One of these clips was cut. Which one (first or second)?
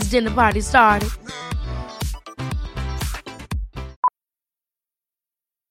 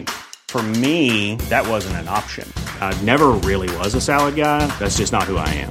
first